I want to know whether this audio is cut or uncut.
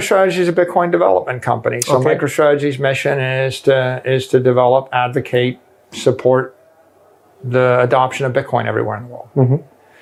uncut